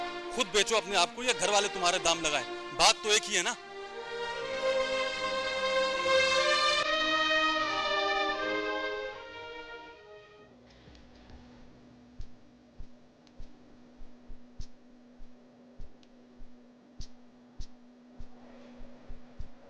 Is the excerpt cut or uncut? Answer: uncut